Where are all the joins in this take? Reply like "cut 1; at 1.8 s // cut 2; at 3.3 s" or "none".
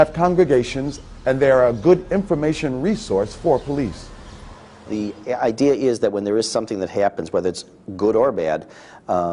cut 1; at 5.4 s

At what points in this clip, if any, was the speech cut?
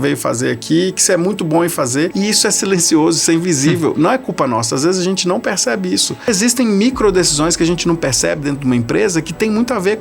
cut 1; at 2.1 s // cut 2; at 6.3 s

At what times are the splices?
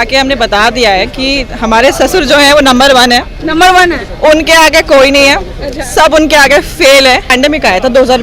cut 1; at 7.3 s

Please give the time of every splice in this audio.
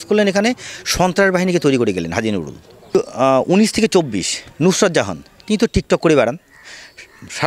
cut 1; at 3.0 s

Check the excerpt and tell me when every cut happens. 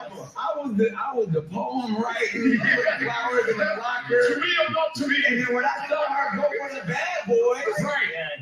none

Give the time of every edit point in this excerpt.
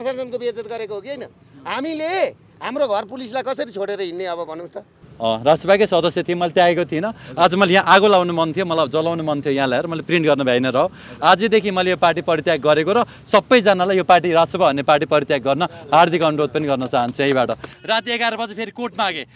cut 1; at 5.0 s // cut 2; at 17.7 s

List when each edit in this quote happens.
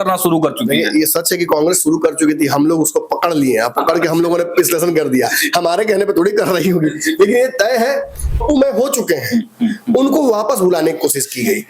cut 1; at 8.4 s

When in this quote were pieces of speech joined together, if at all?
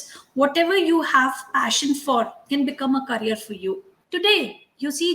cut 1; at 3.9 s

